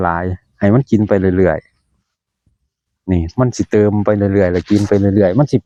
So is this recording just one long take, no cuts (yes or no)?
yes